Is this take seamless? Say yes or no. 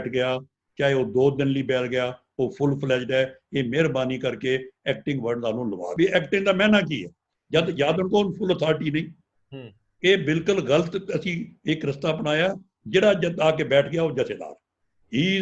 no